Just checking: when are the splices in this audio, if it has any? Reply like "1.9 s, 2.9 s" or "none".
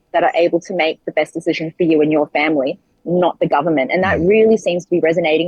none